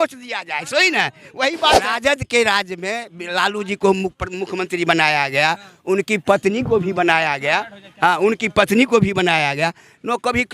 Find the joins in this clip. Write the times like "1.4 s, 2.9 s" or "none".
1.9 s